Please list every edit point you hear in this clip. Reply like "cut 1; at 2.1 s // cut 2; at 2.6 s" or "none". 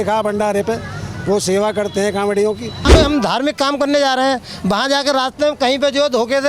cut 1; at 2.9 s